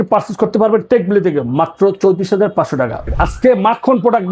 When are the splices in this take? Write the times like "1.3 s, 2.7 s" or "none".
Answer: 3.0 s